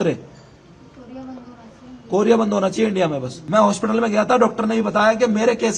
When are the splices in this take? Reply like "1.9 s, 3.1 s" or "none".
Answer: 3.3 s